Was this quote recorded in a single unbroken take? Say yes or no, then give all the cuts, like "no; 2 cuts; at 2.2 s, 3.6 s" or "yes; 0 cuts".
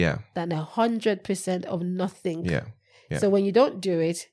yes; 0 cuts